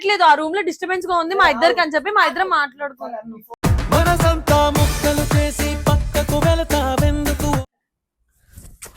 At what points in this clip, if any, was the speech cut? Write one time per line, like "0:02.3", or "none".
0:07.6